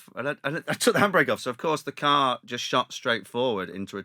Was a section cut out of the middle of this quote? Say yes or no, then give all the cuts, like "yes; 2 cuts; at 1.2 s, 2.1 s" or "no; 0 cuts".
no; 0 cuts